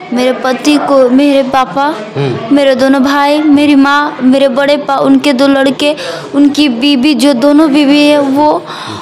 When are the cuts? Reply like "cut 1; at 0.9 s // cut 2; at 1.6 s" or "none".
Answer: none